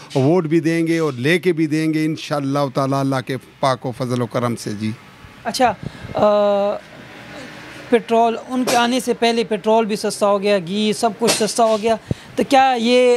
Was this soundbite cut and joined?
no; 0 cuts

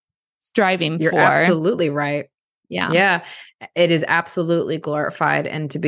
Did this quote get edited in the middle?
no; 0 cuts

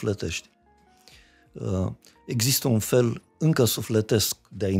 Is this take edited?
no; 0 cuts

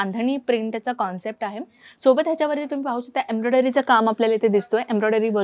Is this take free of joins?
yes; 0 cuts

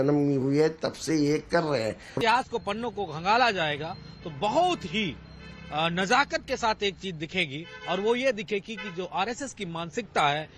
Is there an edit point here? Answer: no; 0 cuts

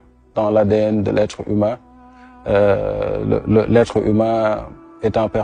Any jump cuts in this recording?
no; 0 cuts

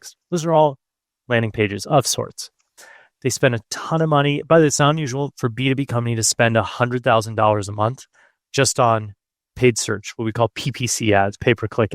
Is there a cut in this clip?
no; 0 cuts

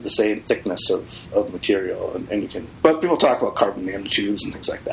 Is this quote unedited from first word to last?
no; 1 cut; at 2.6 s

